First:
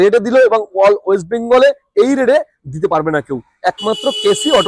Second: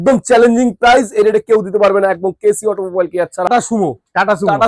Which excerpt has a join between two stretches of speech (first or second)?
second